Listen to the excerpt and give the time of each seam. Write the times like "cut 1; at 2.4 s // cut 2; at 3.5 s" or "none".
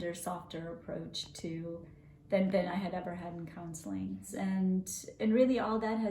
cut 1; at 4.4 s